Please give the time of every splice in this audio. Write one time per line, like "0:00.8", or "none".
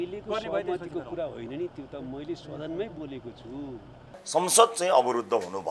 0:04.2